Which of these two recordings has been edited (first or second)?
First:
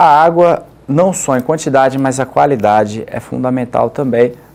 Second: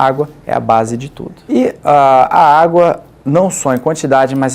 second